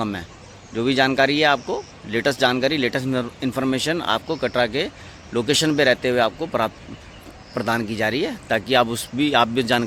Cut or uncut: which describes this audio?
uncut